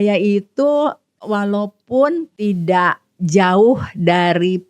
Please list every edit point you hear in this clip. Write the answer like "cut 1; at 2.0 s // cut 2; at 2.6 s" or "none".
cut 1; at 1.2 s // cut 2; at 2.3 s